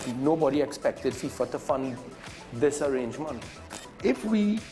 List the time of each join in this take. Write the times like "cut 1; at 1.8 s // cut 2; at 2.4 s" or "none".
none